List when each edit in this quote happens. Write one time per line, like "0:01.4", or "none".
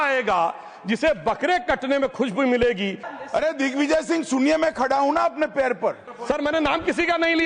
0:03.1
0:06.1